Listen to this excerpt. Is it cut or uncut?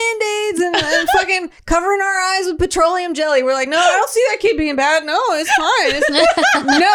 uncut